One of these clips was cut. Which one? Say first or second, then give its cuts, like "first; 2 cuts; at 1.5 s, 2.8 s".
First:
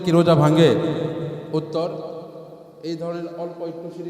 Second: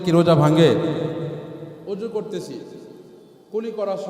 second; 1 cut; at 1.4 s